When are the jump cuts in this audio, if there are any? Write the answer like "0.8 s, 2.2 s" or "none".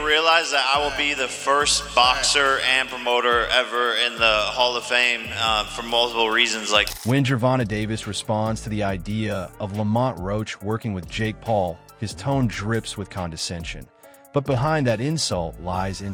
none